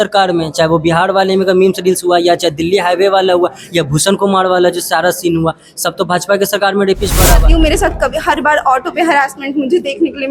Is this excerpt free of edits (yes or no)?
no